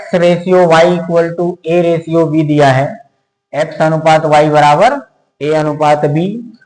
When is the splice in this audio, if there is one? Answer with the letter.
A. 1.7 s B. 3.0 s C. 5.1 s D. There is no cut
D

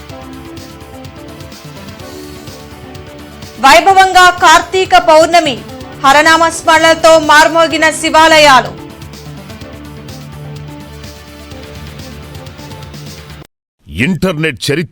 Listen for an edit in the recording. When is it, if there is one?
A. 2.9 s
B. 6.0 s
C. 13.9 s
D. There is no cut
C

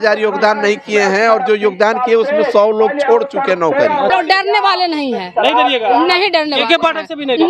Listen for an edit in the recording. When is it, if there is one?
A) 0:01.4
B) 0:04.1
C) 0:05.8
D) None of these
B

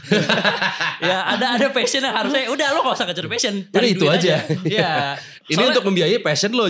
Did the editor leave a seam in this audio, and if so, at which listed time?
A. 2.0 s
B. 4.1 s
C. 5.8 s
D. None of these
D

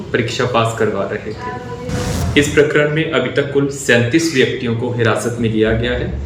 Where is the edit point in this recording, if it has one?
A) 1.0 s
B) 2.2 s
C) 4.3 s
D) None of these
B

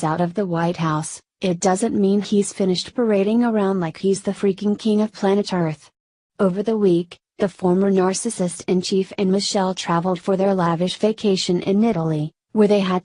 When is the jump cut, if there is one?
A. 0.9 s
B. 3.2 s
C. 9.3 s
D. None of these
D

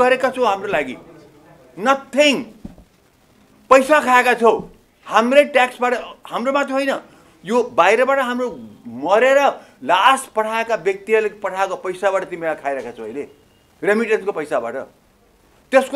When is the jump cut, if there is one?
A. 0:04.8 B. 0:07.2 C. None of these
C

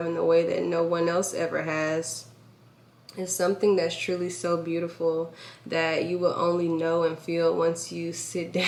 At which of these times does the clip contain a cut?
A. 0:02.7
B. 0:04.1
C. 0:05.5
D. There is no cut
D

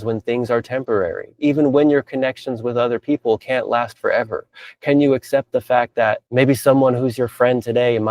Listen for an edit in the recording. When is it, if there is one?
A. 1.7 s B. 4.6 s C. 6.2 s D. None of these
C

